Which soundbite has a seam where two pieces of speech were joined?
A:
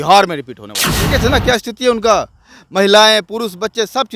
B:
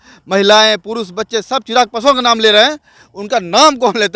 A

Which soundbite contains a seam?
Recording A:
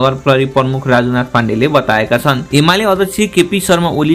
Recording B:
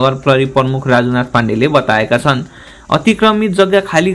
A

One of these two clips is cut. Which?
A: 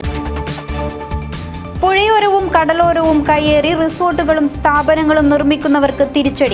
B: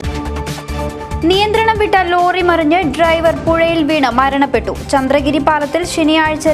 B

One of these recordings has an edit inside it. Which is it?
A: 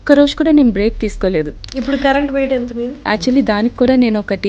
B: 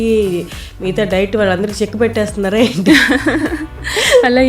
A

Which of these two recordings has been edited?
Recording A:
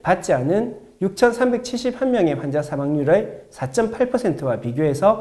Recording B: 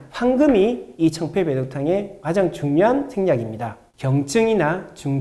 B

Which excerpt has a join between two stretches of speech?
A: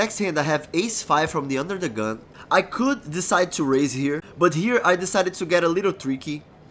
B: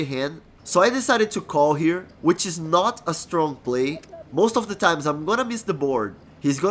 A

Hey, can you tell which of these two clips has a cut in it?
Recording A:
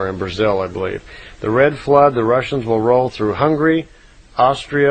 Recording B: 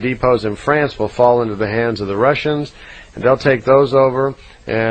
B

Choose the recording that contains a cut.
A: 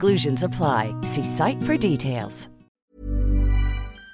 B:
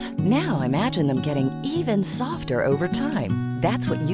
A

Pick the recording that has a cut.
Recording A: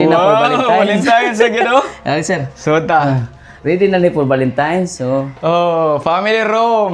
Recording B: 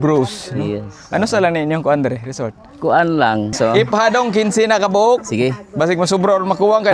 B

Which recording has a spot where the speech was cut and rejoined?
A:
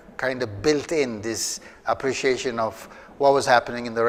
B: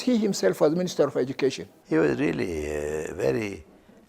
B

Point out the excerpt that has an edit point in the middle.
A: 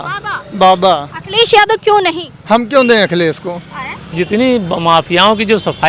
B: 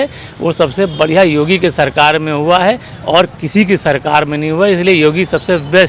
A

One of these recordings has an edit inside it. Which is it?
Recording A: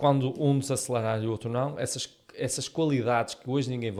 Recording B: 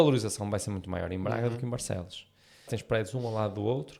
B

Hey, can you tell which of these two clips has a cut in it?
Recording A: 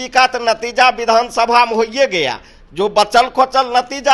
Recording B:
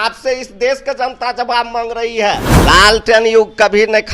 B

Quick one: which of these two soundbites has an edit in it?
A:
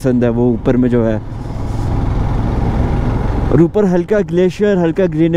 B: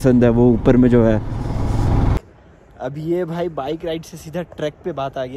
B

